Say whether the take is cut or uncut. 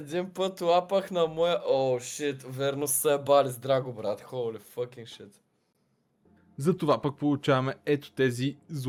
uncut